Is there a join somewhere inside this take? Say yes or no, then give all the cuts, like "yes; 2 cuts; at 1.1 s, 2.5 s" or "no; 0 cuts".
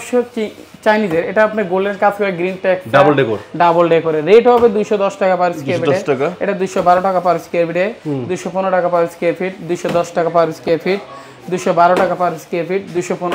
no; 0 cuts